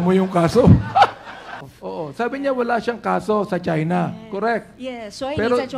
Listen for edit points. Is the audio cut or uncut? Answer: cut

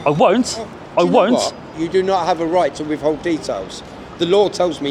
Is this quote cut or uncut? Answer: cut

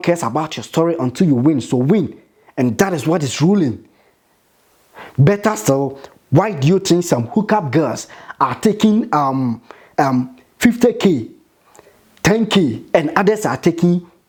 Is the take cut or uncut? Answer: uncut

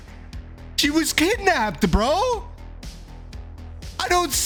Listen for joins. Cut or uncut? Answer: uncut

